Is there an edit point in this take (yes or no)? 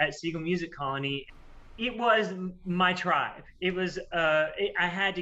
yes